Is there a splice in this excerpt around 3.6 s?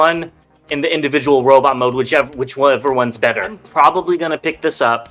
yes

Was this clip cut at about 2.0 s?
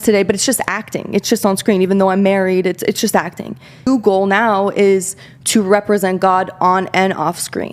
no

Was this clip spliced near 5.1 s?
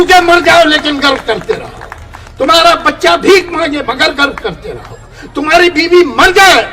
no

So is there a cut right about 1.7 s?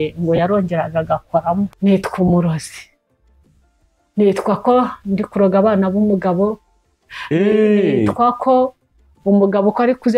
yes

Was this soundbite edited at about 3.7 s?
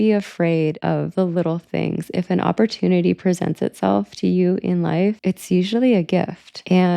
no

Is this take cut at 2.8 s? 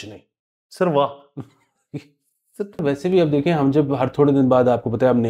yes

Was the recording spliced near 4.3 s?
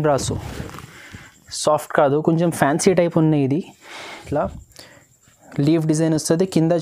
yes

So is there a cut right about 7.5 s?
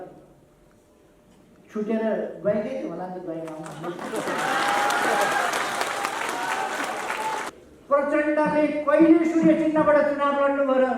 yes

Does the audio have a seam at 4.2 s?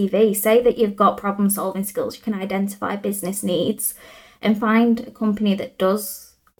no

